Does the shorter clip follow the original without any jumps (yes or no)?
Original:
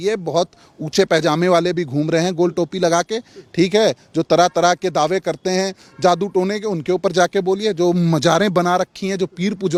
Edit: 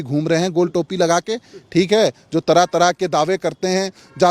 yes